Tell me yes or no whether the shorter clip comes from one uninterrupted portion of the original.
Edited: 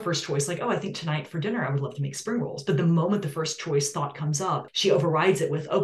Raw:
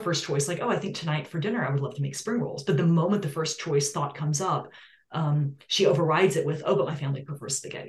no